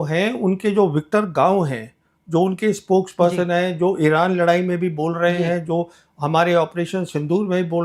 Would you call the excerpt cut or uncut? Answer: uncut